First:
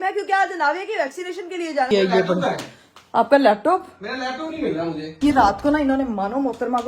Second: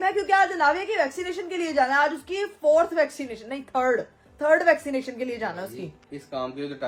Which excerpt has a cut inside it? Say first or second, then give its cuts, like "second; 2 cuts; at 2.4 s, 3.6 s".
first; 2 cuts; at 1.9 s, 5.1 s